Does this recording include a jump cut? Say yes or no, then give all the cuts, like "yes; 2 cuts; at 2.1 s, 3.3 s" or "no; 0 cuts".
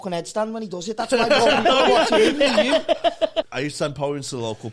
yes; 1 cut; at 3.5 s